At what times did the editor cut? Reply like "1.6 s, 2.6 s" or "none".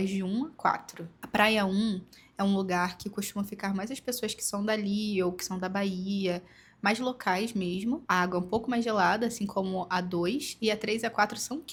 none